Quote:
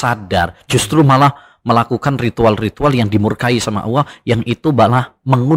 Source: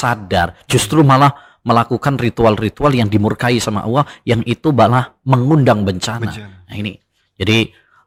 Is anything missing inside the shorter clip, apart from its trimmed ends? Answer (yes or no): no